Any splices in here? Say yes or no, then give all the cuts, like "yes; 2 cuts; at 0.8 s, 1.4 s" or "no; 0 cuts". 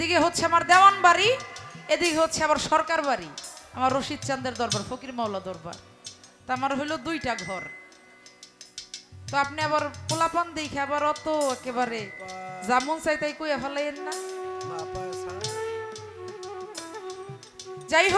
no; 0 cuts